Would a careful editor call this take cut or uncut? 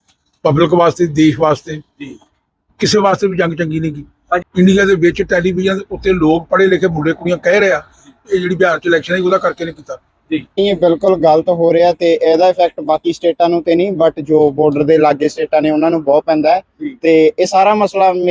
cut